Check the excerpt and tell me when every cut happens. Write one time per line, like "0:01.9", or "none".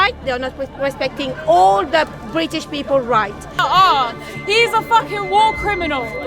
0:03.6